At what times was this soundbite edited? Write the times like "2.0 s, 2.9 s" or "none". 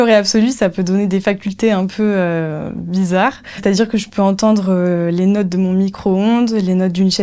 none